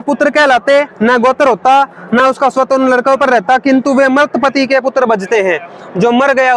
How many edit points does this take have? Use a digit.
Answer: 0